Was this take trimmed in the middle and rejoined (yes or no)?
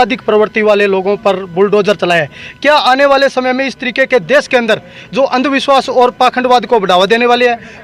no